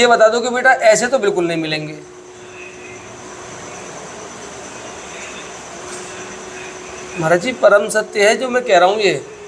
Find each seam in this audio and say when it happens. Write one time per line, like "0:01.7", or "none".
none